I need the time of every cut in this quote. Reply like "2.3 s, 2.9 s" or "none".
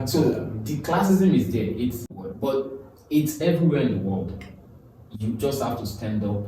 2.2 s